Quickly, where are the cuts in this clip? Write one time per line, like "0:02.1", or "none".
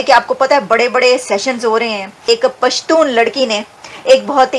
0:02.1